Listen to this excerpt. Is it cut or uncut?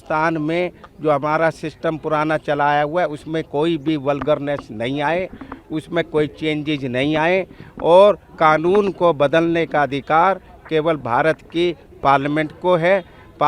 uncut